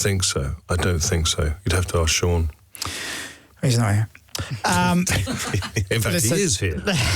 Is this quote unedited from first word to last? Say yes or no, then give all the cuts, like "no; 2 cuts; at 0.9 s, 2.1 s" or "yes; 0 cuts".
yes; 0 cuts